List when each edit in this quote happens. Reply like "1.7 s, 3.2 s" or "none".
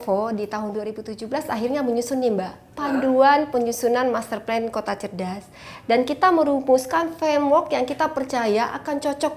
none